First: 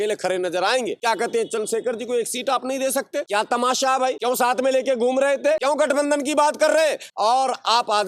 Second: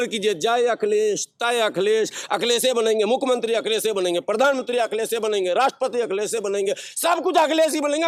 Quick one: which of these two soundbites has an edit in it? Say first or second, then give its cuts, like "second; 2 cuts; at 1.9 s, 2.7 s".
first; 5 cuts; at 1.0 s, 3.3 s, 4.2 s, 5.6 s, 7.0 s